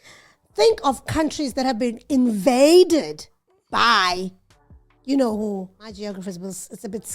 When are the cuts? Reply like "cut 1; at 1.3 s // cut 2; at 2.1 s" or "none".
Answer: cut 1; at 6.0 s